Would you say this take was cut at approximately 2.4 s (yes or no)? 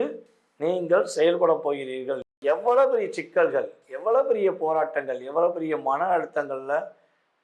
yes